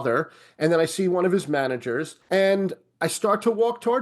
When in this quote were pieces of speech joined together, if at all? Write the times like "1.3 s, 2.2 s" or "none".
2.1 s